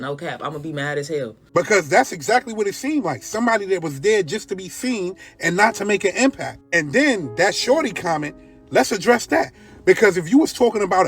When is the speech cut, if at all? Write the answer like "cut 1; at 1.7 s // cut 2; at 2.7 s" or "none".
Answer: cut 1; at 1.4 s